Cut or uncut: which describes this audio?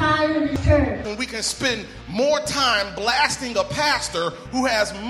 cut